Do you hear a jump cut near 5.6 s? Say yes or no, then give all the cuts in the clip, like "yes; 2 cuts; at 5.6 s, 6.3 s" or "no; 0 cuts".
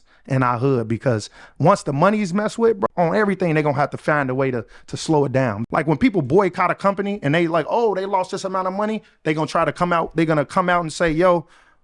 yes; 2 cuts; at 2.9 s, 5.6 s